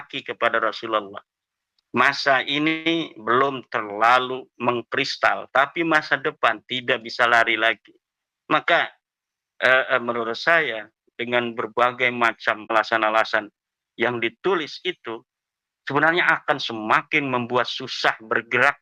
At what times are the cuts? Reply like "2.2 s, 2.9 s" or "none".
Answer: 12.7 s